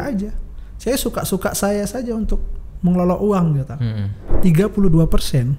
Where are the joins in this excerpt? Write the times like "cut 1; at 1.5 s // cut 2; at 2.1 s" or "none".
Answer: cut 1; at 4.3 s